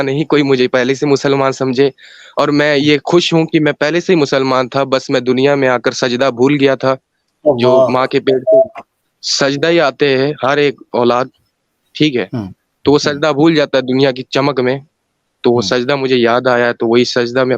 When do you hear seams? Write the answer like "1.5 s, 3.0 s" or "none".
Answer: none